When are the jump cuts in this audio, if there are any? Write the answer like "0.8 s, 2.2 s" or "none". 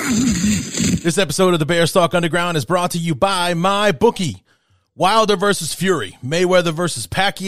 0.9 s